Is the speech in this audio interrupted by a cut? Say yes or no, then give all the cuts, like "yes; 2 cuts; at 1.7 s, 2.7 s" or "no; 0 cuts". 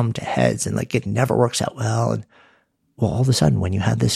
no; 0 cuts